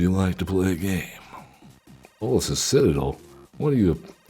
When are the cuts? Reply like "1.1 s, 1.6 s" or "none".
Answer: 2.2 s